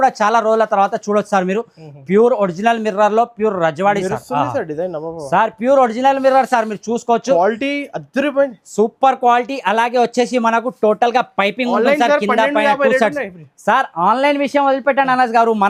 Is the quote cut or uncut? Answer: uncut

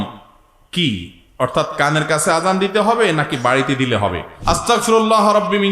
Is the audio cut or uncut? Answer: cut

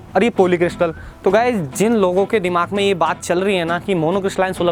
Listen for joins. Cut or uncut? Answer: uncut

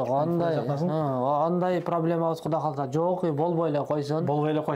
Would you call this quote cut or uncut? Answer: uncut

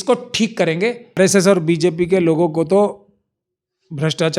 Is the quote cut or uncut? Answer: cut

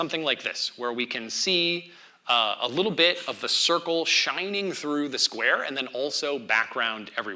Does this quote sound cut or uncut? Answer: uncut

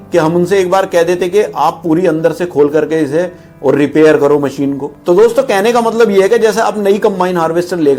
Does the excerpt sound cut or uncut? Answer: uncut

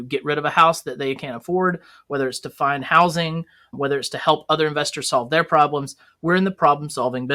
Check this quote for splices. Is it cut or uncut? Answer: cut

